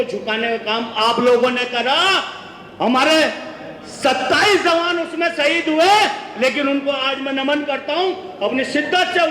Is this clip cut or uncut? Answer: uncut